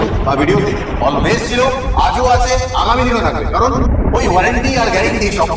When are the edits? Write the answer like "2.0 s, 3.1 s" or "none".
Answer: none

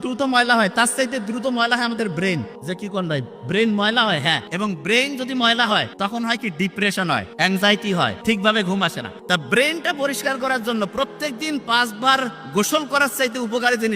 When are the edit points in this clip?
2.5 s, 4.5 s, 5.9 s, 7.3 s, 8.2 s, 9.1 s

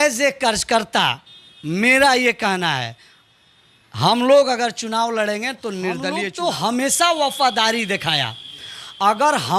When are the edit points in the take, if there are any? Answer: 6.2 s

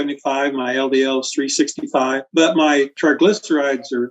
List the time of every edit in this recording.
2.2 s

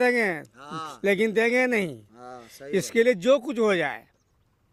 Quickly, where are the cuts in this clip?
none

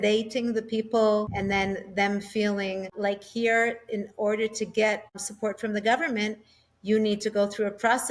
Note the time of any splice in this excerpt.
1.3 s, 2.9 s, 5.3 s

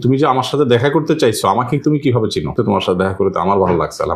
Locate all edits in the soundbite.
2.5 s

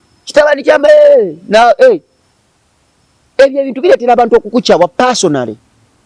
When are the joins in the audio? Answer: none

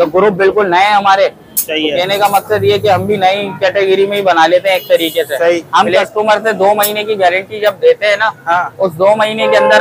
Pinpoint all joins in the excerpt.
5.7 s

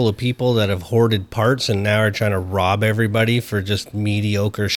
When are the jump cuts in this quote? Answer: none

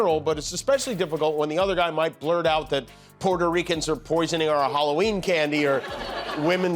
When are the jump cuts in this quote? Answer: 5.8 s

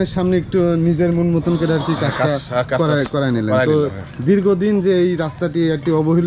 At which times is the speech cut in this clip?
none

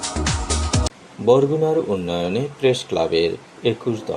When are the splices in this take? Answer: 1.0 s

